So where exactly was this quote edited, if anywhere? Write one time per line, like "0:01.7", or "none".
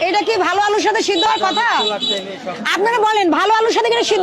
0:01.2